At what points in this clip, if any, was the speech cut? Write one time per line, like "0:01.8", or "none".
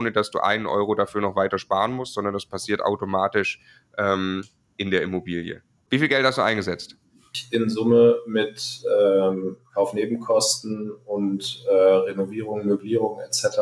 0:05.8
0:07.4